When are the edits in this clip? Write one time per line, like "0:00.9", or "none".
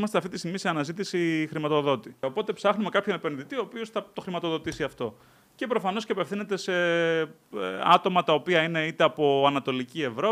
0:02.2